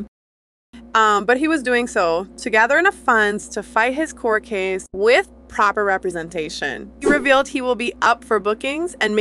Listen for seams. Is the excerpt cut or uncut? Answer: cut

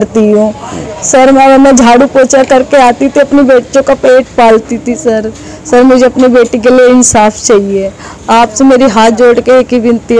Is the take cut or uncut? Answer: uncut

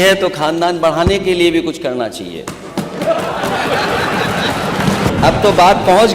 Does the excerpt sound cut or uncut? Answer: cut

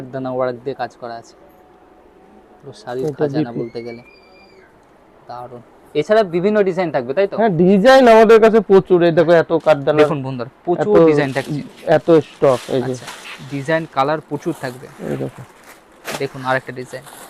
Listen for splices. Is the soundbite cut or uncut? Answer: uncut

